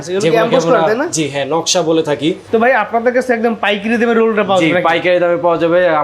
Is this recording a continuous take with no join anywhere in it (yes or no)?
no